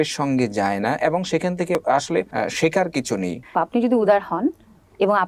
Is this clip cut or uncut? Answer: cut